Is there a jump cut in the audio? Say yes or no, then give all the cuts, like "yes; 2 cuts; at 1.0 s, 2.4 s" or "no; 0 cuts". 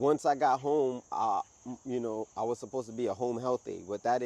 no; 0 cuts